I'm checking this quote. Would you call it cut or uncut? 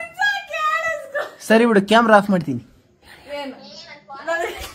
uncut